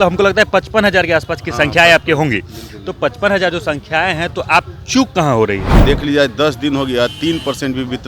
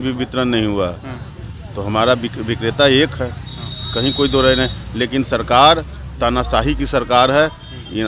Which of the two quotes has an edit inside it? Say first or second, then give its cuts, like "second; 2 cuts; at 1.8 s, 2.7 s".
first; 1 cut; at 5.7 s